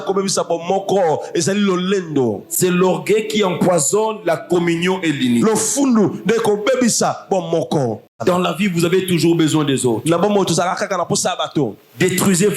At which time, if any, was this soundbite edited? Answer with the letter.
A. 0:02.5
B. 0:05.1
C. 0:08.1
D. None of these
C